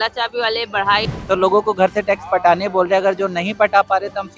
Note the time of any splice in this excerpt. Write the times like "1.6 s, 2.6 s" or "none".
1.1 s